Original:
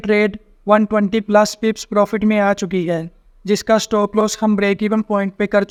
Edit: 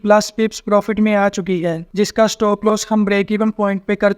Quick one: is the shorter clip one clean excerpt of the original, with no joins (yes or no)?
no